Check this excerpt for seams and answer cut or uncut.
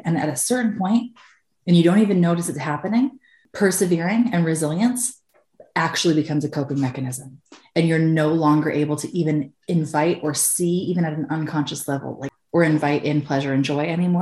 uncut